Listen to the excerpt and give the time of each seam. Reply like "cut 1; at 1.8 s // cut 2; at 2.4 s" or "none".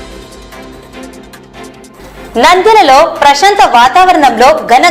cut 1; at 1.6 s